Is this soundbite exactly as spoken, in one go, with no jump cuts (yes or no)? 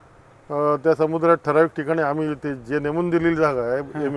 yes